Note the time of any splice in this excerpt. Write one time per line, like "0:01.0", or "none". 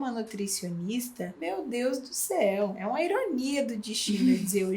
0:01.4
0:02.8